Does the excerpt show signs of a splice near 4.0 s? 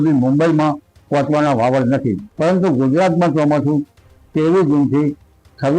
no; 1 cut; at 2.3 s

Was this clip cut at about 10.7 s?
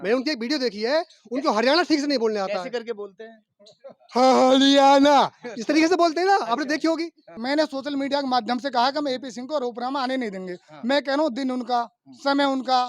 no; 1 cut; at 7.3 s

